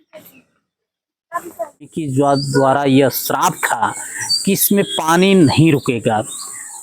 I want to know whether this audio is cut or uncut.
cut